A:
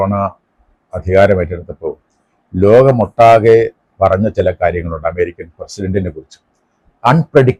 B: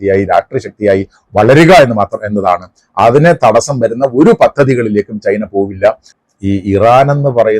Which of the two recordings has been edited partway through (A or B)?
B